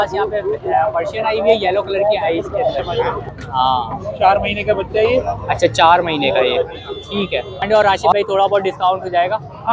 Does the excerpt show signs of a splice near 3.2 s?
yes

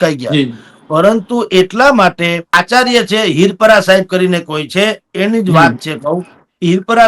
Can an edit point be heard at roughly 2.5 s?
yes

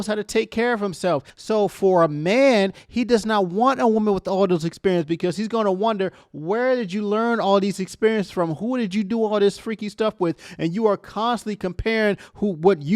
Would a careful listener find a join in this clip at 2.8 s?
no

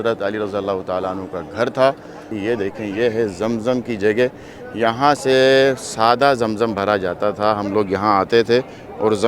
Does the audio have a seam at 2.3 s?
yes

